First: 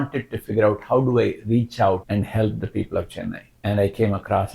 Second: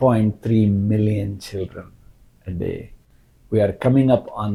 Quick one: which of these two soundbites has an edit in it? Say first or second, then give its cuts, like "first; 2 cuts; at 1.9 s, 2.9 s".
first; 2 cuts; at 2.0 s, 3.5 s